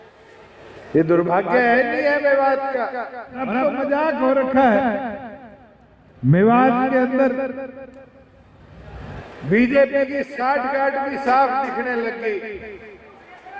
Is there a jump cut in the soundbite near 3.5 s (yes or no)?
yes